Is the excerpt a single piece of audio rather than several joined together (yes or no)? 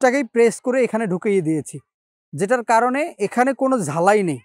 yes